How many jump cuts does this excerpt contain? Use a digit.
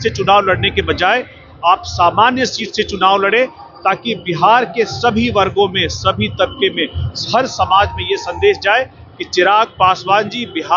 0